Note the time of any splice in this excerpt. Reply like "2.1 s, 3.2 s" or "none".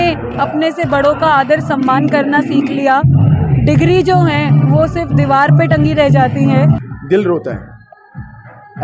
6.9 s